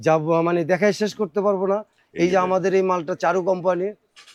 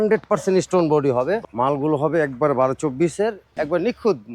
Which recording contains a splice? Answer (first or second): second